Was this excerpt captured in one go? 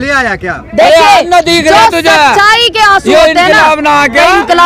yes; 0 cuts

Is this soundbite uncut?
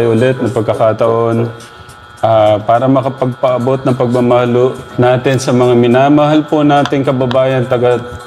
no; 1 cut; at 4.8 s

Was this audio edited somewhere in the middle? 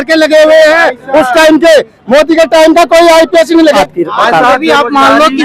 yes; 1 cut; at 3.8 s

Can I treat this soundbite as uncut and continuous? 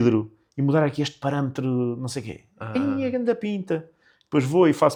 yes; 0 cuts

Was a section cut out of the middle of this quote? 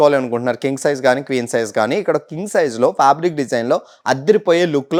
no; 0 cuts

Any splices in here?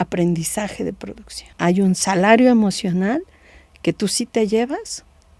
yes; 1 cut; at 1.5 s

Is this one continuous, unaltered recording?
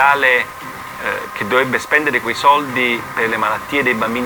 yes; 0 cuts

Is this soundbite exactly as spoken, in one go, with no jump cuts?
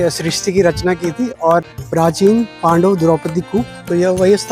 no; 1 cut; at 1.6 s

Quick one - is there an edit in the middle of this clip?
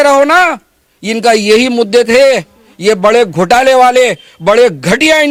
no; 0 cuts

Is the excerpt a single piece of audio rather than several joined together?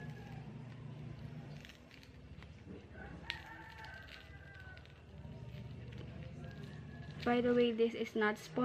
no; 1 cut; at 7.0 s

